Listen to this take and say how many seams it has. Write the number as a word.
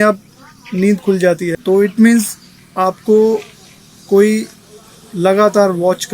one